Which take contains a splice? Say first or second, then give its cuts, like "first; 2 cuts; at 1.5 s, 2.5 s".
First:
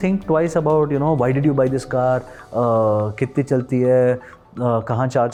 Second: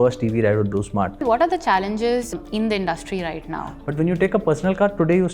second; 3 cuts; at 1.2 s, 2.3 s, 3.8 s